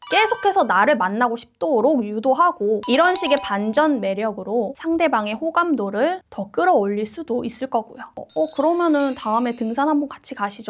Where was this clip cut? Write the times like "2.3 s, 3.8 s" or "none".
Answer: 2.8 s, 8.1 s